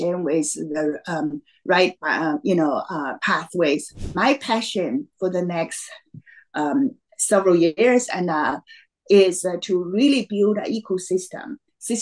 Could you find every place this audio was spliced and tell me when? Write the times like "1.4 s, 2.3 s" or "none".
4.2 s